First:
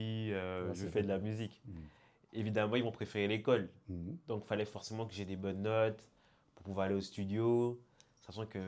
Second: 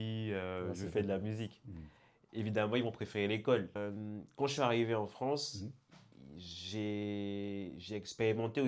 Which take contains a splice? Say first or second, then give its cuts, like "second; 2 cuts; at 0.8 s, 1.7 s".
second; 1 cut; at 3.8 s